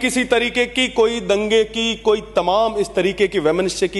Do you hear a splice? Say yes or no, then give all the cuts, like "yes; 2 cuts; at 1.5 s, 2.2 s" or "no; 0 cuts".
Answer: no; 0 cuts